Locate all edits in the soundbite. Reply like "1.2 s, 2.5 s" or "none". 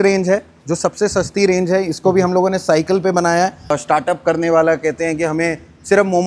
3.7 s